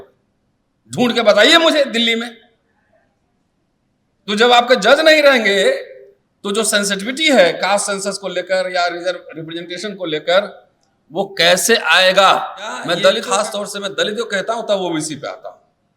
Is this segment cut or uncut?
cut